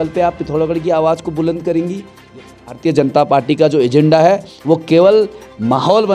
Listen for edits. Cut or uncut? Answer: cut